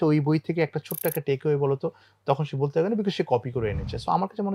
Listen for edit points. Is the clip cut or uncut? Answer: uncut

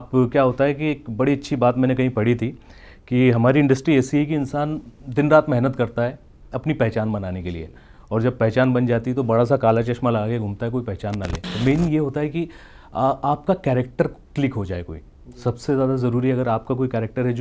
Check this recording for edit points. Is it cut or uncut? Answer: cut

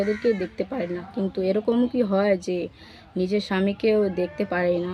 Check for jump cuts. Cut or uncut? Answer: uncut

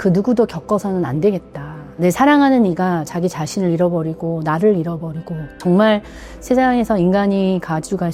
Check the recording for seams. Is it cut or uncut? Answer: cut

